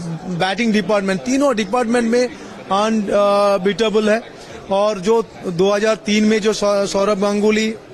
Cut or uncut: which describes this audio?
uncut